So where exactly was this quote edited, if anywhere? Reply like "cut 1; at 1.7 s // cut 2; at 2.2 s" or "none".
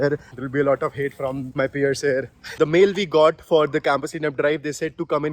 cut 1; at 1.4 s // cut 2; at 2.4 s